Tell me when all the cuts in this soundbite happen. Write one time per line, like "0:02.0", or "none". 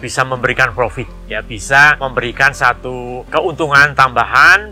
0:02.0
0:03.2